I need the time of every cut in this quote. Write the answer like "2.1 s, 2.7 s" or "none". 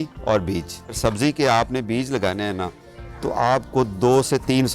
1.0 s